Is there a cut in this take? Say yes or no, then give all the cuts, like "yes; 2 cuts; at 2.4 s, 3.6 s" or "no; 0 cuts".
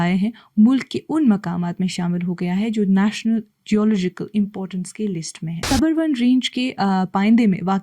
yes; 1 cut; at 5.7 s